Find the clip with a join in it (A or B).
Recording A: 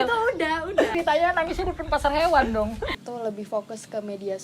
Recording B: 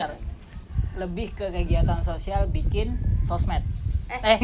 A